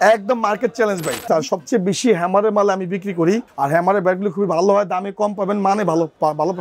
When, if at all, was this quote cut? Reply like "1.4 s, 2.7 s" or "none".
1.3 s, 3.5 s